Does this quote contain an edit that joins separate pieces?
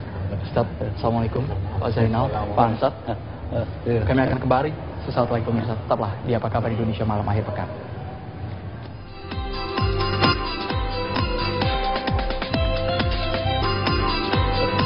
yes; 1 cut; at 13.6 s

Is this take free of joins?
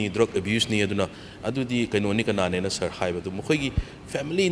yes; 0 cuts

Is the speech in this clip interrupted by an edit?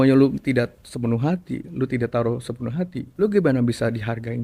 yes; 1 cut; at 3.0 s

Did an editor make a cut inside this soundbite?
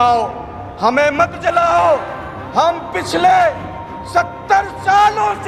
no; 0 cuts

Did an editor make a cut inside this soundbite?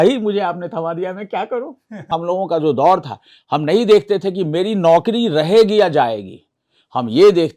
yes; 1 cut; at 2.1 s

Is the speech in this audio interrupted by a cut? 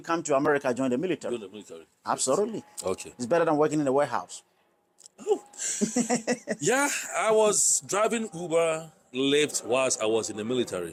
no; 0 cuts

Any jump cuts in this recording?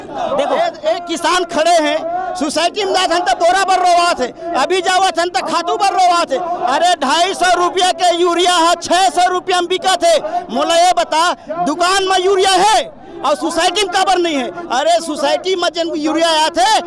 no; 0 cuts

